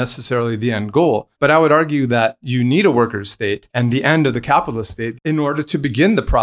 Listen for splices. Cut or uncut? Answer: cut